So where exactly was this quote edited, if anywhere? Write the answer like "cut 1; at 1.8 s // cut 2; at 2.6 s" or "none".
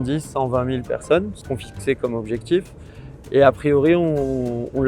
cut 1; at 1.4 s